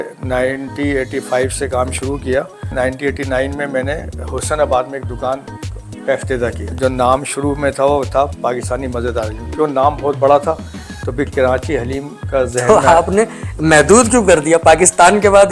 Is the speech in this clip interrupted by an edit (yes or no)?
yes